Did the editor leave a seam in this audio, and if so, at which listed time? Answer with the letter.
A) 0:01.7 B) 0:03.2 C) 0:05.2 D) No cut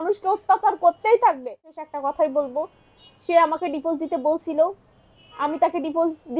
A